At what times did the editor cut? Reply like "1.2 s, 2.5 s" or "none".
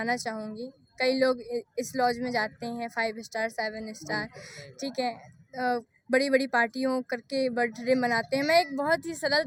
none